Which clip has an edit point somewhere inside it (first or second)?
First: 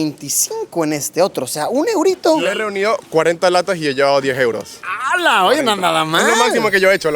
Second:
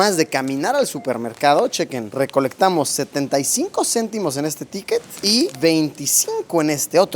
first